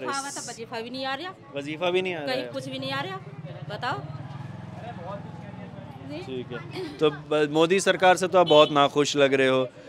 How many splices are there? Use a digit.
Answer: 0